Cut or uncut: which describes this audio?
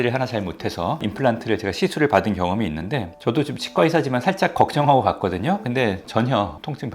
cut